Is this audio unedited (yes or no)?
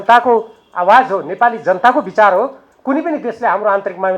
yes